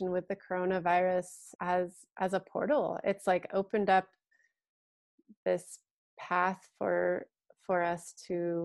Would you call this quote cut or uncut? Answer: cut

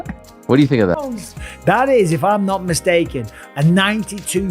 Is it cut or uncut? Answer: cut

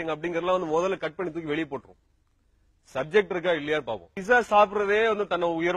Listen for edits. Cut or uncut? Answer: cut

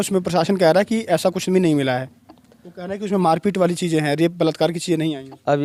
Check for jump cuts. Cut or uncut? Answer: uncut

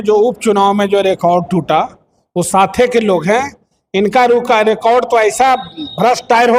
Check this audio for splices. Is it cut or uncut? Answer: uncut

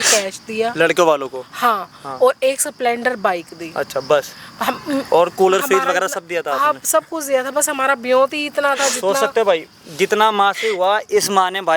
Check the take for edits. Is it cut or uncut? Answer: uncut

